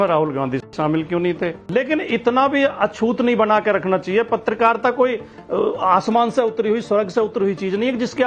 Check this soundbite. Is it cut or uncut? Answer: cut